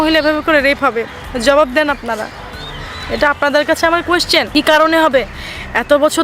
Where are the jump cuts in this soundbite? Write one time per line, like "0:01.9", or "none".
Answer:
0:04.5